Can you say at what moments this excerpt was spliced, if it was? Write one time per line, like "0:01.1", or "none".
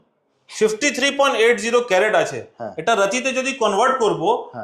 none